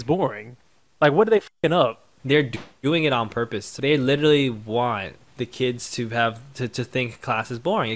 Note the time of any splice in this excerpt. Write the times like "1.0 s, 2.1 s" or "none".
2.1 s, 3.7 s, 5.2 s